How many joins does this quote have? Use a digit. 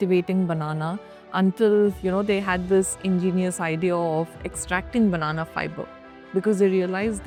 0